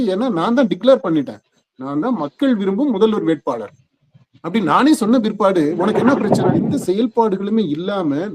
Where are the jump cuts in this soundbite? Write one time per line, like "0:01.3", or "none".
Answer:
0:06.6